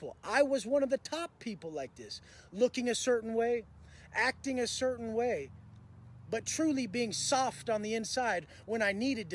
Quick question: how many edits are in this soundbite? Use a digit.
0